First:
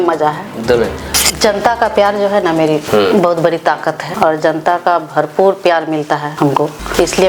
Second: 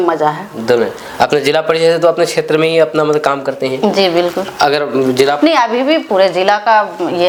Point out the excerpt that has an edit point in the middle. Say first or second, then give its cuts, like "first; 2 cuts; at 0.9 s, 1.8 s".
first; 4 cuts; at 1.0 s, 2.8 s, 4.1 s, 6.6 s